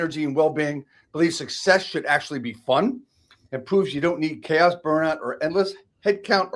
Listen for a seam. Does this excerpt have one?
no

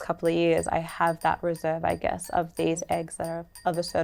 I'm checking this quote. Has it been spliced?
no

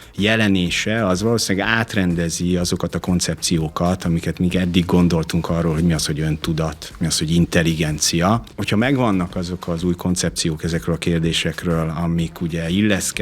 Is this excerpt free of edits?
no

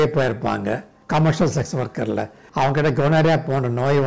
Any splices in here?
no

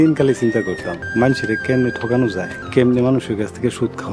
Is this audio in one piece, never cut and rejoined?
no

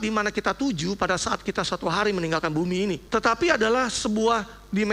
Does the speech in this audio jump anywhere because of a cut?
yes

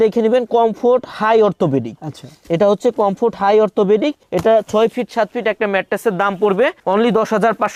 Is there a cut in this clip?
no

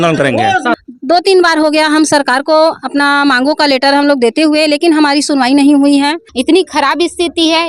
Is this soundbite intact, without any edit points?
no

